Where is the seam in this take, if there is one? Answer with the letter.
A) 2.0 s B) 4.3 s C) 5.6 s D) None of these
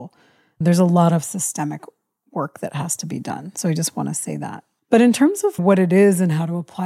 C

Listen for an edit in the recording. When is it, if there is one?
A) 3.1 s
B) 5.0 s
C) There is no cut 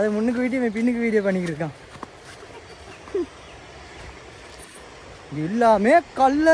C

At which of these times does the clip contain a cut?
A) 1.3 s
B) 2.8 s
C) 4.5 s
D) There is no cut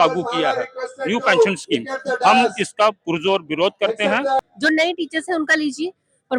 C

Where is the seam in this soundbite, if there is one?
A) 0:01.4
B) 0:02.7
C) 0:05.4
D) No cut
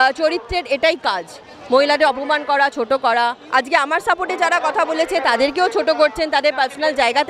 D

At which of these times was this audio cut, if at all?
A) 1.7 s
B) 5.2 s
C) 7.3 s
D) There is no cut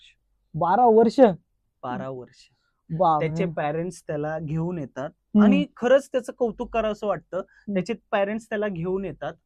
D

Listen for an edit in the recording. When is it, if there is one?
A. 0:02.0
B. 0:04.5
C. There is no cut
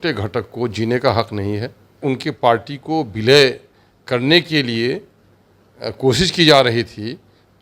A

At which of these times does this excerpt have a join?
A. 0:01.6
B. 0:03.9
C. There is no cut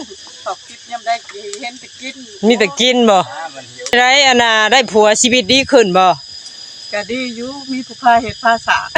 B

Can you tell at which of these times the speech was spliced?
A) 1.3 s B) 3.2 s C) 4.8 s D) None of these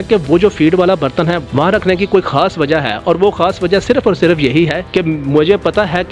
C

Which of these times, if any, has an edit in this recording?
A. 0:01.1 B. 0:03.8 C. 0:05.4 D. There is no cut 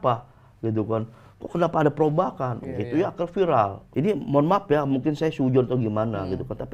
B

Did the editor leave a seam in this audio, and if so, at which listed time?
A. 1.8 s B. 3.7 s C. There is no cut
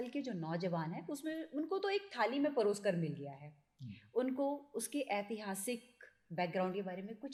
C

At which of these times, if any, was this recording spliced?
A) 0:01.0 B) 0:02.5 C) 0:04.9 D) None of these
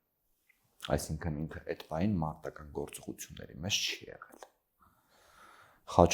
D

